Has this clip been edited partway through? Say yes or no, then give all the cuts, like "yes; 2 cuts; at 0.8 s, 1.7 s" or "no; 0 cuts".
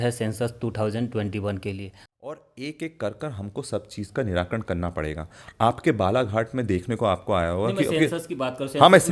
yes; 1 cut; at 1.9 s